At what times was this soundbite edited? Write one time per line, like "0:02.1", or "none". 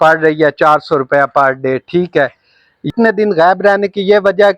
0:02.9